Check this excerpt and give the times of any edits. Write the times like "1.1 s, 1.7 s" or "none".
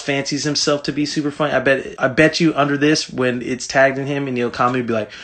1.9 s

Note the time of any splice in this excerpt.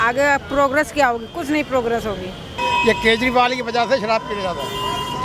2.5 s

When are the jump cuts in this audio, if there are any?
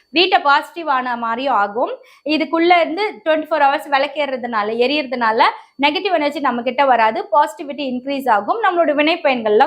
none

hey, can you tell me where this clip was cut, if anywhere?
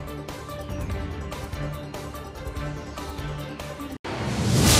3.7 s

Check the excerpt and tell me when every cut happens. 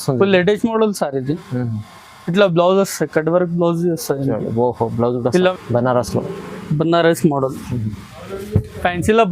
5.5 s

